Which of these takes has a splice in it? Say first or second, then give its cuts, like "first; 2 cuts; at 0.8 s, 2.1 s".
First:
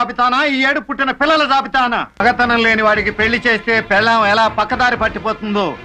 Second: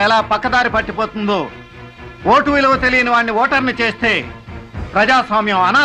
first; 1 cut; at 2.2 s